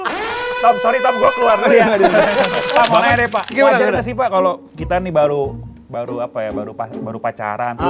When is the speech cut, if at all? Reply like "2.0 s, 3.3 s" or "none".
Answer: 2.6 s